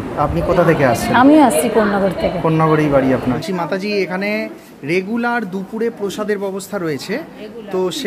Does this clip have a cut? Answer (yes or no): yes